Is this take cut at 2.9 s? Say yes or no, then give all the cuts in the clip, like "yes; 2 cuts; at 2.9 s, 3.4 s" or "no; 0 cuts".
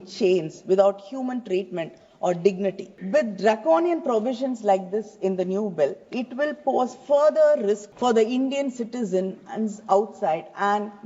yes; 2 cuts; at 2.9 s, 7.9 s